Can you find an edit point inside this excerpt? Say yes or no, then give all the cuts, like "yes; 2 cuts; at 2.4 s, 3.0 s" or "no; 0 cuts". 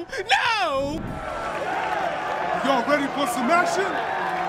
yes; 1 cut; at 1.2 s